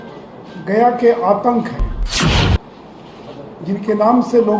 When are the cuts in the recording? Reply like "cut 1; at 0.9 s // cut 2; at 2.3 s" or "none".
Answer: cut 1; at 2.4 s